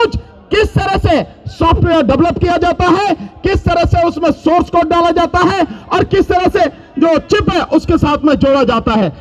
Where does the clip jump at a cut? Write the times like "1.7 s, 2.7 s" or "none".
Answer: none